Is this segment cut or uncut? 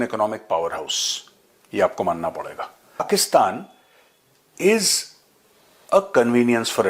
cut